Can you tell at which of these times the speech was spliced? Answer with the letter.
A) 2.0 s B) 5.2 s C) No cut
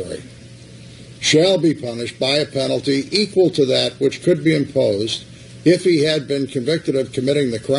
A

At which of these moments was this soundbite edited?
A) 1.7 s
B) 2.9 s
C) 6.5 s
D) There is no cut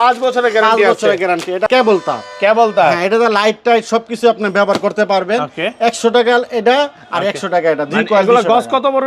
A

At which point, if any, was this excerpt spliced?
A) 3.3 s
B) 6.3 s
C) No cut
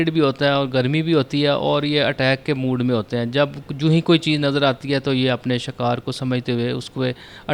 C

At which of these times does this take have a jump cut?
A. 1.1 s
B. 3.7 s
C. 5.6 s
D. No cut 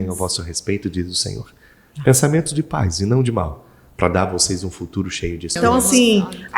C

